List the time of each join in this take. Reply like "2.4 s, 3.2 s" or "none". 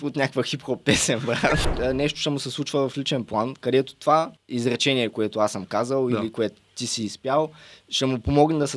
1.7 s, 4.4 s